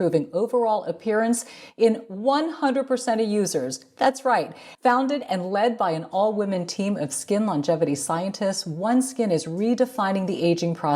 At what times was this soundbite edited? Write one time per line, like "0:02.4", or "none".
0:04.6

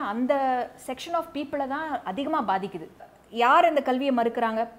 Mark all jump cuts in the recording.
0:03.1

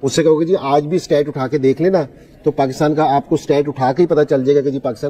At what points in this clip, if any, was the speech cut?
none

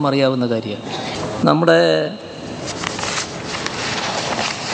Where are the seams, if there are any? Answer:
0:01.1

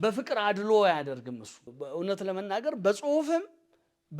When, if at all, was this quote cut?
0:01.7

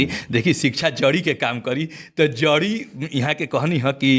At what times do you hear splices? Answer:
none

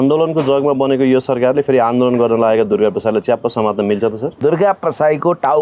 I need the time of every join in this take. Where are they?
0:04.4

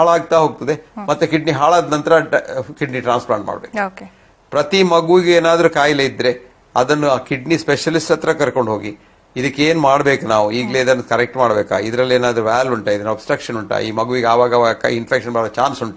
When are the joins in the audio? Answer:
none

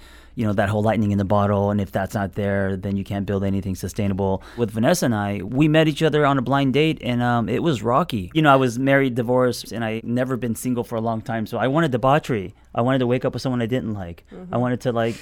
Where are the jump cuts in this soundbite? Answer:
0:04.6
0:08.2

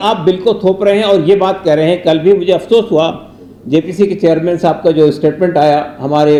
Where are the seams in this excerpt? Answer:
none

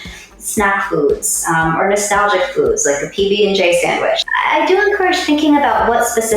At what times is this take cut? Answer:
0:04.2

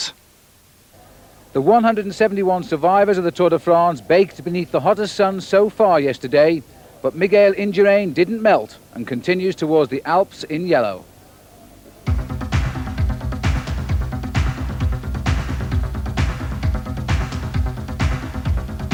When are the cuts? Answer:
none

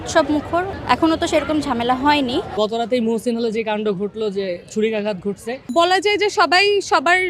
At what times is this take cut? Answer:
0:02.5
0:05.7

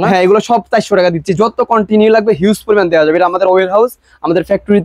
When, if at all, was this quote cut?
none

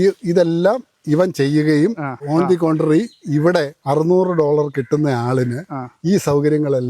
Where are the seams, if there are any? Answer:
0:02.2
0:03.8

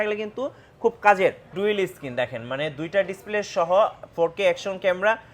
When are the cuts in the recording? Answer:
0:01.5

